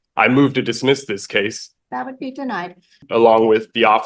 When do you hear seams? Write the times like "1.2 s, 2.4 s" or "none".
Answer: 1.7 s, 3.0 s